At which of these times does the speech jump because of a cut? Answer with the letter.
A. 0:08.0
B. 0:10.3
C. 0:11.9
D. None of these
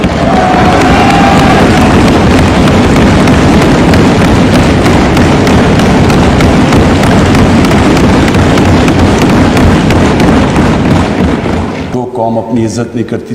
C